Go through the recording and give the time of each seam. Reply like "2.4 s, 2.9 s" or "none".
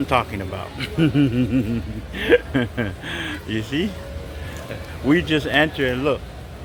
none